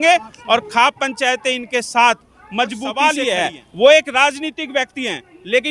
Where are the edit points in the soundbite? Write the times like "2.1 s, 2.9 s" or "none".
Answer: 3.0 s